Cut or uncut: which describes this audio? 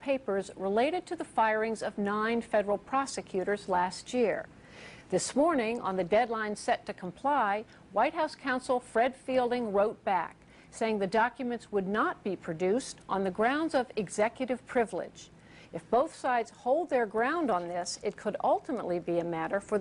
cut